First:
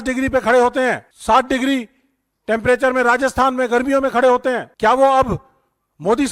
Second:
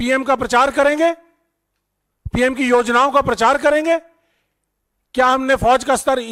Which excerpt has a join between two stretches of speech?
first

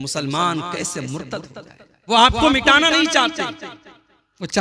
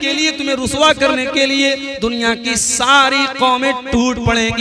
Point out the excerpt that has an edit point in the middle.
first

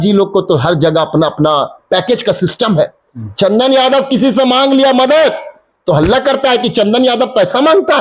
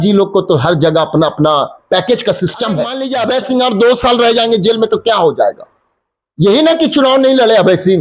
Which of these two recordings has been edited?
second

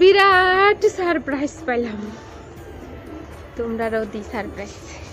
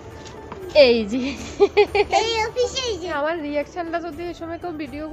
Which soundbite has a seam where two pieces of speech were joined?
second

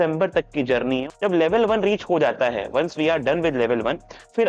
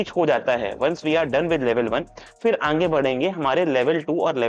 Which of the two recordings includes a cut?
first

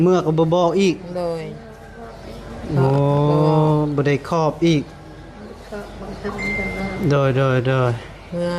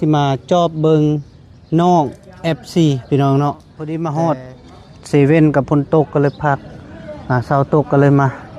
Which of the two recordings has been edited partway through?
second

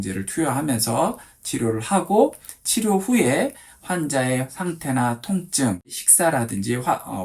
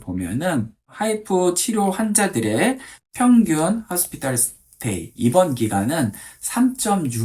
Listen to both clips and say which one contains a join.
first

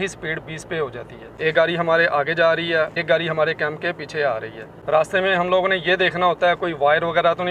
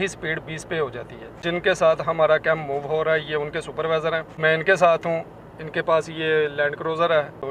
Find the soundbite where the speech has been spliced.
first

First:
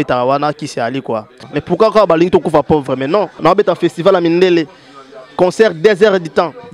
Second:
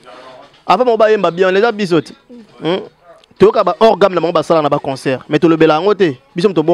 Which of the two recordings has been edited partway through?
first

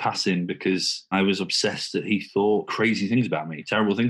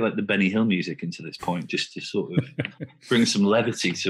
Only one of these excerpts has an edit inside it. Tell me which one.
first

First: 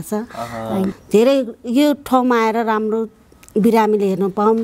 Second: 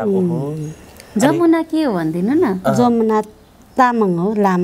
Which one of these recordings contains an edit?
first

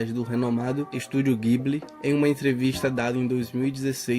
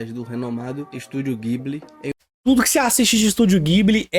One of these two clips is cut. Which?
first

